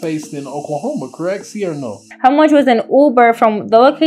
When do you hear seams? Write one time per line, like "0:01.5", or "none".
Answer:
0:02.1